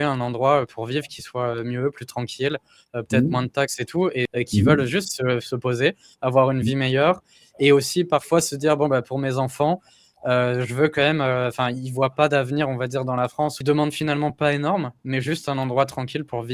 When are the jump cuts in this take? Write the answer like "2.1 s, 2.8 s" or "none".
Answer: 4.3 s, 13.6 s